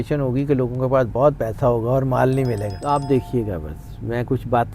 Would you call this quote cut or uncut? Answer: cut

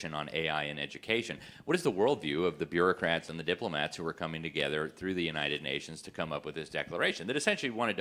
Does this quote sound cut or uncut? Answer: uncut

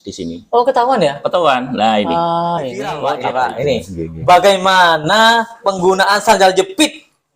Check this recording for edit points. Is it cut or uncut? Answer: cut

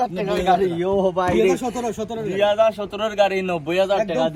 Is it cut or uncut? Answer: uncut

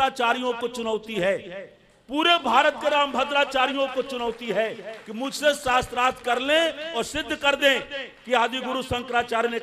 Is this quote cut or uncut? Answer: uncut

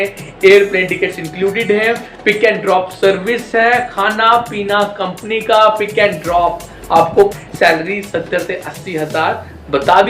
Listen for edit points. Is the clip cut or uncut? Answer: cut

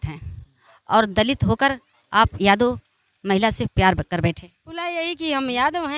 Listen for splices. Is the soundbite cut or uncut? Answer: cut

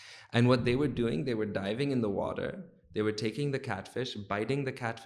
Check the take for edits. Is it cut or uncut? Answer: uncut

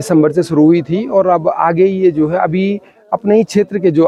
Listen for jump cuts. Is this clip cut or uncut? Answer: uncut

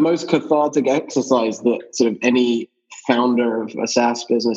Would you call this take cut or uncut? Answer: cut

